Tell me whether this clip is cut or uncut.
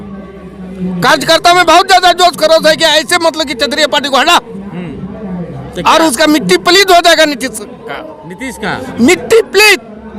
uncut